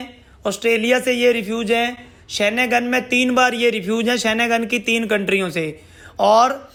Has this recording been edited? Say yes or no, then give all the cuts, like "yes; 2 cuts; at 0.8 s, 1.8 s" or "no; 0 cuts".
no; 0 cuts